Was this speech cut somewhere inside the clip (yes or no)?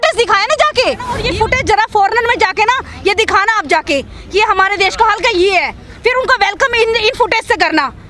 yes